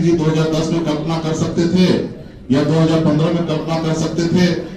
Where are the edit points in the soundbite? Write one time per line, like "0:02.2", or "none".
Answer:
none